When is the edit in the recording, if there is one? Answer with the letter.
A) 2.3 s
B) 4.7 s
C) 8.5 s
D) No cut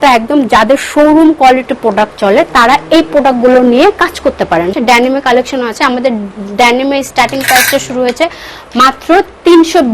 B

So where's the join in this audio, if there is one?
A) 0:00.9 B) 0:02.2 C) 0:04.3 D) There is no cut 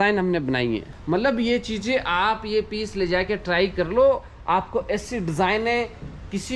A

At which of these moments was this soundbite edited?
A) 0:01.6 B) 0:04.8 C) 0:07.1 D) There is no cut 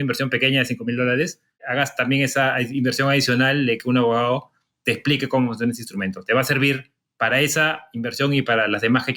A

